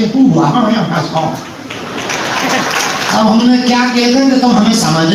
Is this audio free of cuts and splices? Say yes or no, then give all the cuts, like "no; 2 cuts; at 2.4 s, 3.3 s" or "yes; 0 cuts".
yes; 0 cuts